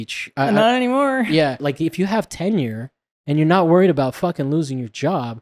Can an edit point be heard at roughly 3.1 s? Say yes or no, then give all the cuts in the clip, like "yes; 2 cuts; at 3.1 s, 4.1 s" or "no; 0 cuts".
no; 1 cut; at 1.6 s